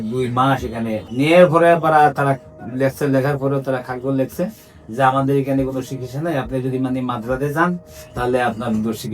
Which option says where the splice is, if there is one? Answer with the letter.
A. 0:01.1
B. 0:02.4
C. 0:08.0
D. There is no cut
A